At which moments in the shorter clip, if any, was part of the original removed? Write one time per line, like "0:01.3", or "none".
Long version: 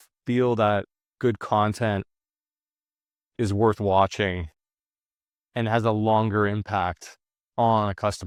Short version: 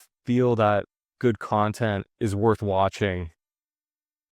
0:02.1